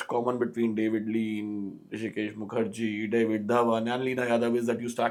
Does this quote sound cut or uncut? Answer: uncut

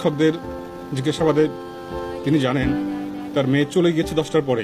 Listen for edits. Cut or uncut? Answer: uncut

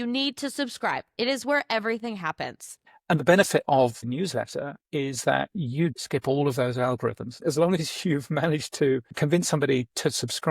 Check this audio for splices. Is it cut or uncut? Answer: cut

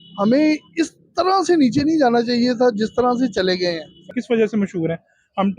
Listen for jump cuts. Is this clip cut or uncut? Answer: cut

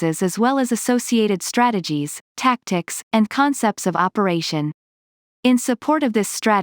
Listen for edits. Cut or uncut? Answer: cut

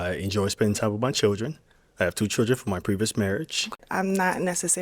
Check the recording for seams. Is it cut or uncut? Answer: cut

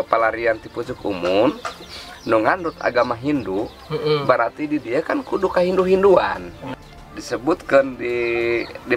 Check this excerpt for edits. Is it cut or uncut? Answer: cut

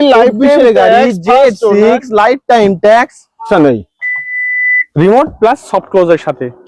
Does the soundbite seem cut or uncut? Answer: cut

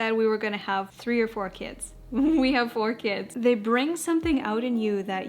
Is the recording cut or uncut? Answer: cut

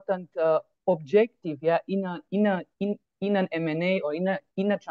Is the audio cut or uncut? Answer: uncut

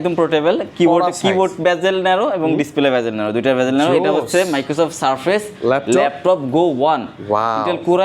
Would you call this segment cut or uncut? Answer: uncut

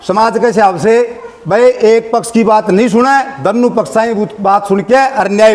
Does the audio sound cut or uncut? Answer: uncut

